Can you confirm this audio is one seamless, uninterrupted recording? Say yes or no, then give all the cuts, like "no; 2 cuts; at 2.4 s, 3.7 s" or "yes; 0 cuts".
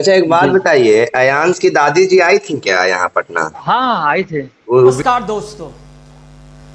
no; 1 cut; at 5.0 s